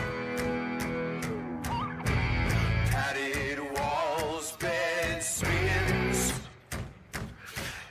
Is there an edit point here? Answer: yes; 1 cut; at 1.6 s

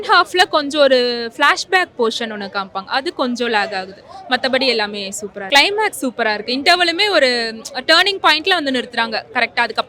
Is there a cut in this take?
no; 0 cuts

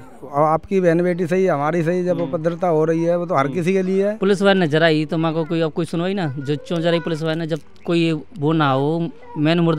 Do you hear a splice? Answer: yes; 1 cut; at 4.2 s

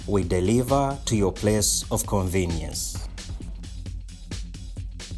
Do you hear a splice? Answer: no; 0 cuts

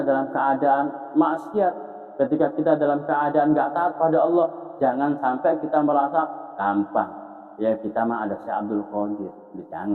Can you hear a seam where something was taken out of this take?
no; 0 cuts

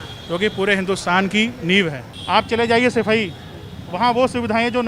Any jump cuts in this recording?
yes; 1 cut; at 2.1 s

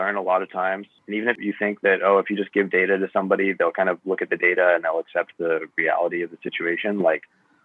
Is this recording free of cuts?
no; 1 cut; at 1.4 s

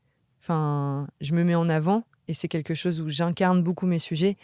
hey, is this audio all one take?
yes; 0 cuts

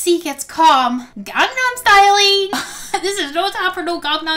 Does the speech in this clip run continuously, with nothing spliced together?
yes; 0 cuts

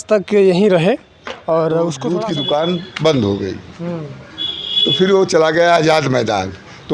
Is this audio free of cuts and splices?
no; 1 cut; at 2.2 s

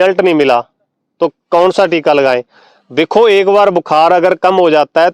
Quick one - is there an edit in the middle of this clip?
no; 0 cuts

